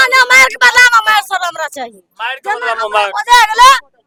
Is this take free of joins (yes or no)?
yes